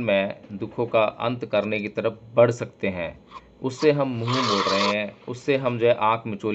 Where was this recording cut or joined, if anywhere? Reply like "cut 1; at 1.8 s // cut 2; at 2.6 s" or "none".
none